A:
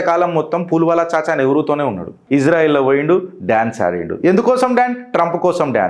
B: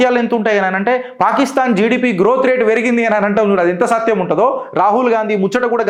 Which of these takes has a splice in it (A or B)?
A